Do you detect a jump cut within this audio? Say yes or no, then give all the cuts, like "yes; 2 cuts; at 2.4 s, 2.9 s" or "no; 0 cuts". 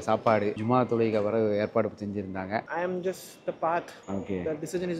yes; 2 cuts; at 2.7 s, 4.0 s